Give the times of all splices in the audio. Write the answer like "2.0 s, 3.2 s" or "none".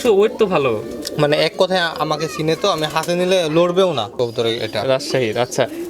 4.1 s

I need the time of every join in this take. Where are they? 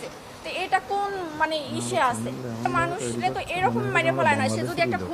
2.6 s

